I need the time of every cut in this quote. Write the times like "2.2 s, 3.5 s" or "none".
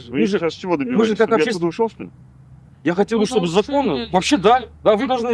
none